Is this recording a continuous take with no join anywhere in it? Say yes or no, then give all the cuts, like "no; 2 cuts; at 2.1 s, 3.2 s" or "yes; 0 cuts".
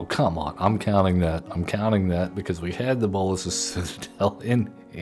yes; 0 cuts